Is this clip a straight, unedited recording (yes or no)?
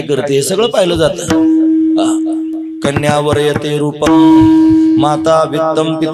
yes